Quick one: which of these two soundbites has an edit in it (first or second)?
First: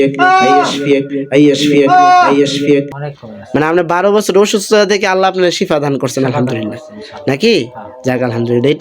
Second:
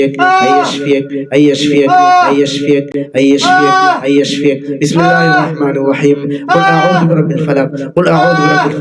first